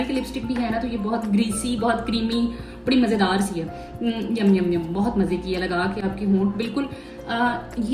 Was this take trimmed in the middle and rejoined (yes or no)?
no